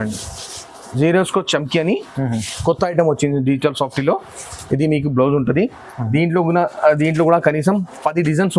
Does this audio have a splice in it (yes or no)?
no